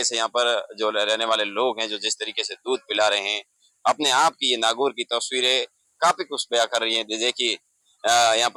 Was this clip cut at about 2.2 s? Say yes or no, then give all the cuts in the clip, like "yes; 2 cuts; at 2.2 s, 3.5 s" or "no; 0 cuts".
no; 0 cuts